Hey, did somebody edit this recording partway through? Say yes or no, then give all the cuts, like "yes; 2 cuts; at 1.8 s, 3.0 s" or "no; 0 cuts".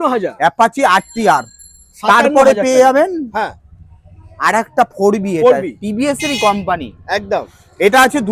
no; 0 cuts